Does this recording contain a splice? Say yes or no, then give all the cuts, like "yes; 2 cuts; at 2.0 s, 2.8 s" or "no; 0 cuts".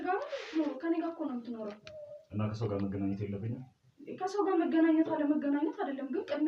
no; 0 cuts